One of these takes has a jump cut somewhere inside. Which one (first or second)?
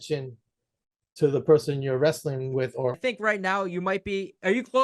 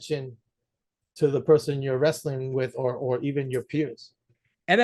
first